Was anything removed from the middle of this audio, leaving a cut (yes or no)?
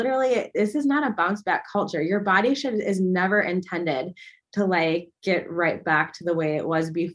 no